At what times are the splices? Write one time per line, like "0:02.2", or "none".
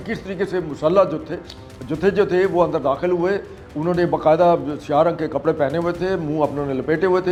none

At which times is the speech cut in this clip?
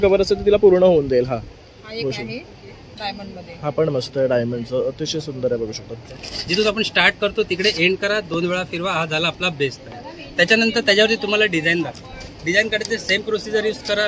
0:06.1

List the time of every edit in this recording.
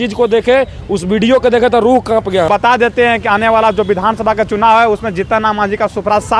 0:02.5

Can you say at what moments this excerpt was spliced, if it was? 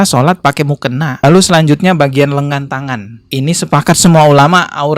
0:01.1

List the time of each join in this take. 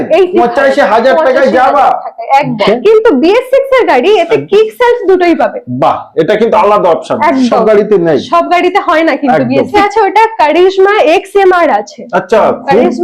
0:02.6
0:09.7

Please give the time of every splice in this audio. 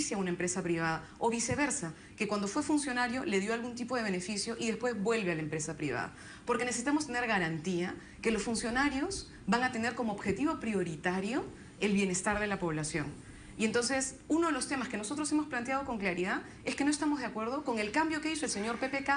0:07.7

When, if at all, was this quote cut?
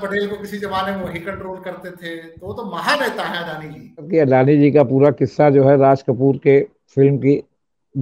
0:04.1

